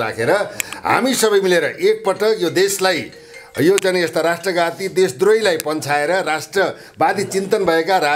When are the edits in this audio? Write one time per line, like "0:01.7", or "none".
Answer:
none